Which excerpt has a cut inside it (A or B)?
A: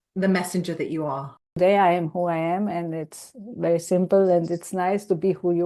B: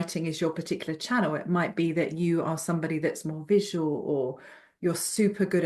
A